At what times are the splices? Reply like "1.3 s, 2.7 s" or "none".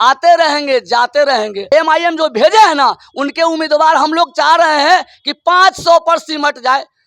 1.7 s